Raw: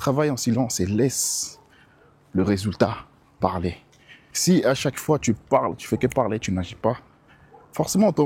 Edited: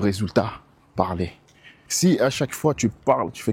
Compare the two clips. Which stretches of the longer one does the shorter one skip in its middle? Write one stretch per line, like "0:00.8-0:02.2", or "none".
none